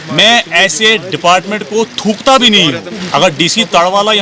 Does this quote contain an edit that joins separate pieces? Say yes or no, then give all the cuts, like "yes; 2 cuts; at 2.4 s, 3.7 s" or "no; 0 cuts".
yes; 1 cut; at 2.9 s